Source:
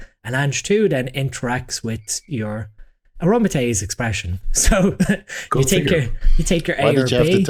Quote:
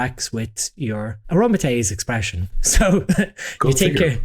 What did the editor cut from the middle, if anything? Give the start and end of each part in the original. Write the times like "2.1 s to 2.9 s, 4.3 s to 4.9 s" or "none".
2.7 s to 3.1 s